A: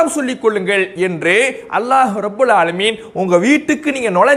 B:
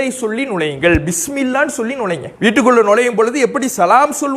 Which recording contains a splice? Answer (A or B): B